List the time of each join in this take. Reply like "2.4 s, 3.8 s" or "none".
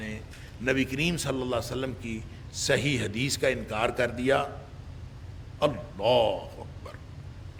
none